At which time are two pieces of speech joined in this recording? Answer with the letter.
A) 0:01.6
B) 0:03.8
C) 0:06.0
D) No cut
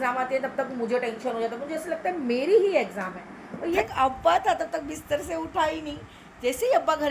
B